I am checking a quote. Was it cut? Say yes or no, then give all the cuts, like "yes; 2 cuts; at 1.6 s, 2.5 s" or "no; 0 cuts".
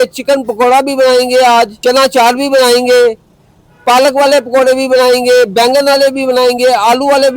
yes; 1 cut; at 1.7 s